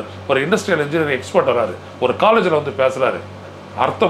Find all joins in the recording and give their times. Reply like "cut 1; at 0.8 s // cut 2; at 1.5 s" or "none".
none